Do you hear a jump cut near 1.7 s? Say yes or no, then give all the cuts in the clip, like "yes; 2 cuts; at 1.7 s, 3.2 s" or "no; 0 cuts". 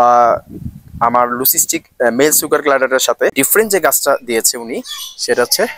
no; 1 cut; at 3.3 s